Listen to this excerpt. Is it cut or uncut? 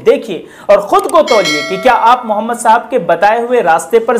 uncut